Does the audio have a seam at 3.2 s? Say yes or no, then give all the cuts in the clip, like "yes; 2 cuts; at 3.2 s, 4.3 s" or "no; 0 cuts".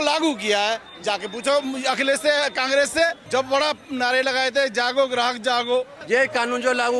yes; 2 cuts; at 3.2 s, 6.0 s